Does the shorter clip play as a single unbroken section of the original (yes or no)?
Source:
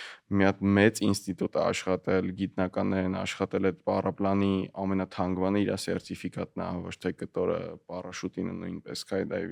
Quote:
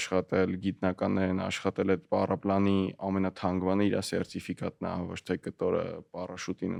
yes